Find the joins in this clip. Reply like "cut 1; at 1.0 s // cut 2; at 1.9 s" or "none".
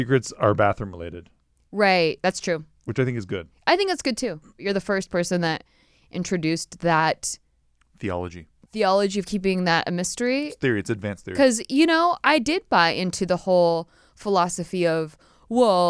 cut 1; at 4.6 s